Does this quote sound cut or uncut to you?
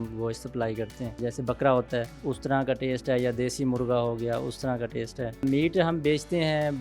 cut